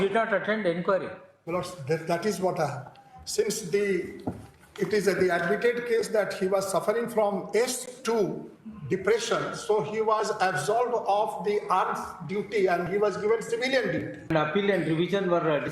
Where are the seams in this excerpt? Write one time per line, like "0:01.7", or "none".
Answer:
0:14.3